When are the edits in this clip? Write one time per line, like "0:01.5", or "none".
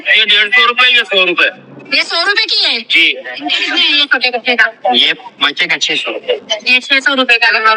0:03.6